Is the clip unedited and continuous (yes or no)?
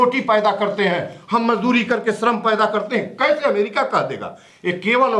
yes